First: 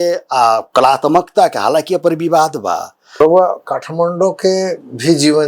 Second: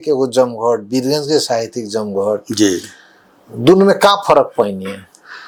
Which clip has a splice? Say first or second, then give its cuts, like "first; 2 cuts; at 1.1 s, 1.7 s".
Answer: first; 1 cut; at 3.2 s